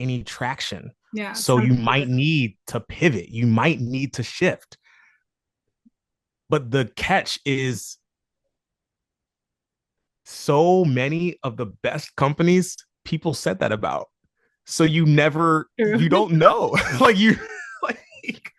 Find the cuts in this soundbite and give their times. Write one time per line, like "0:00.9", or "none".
none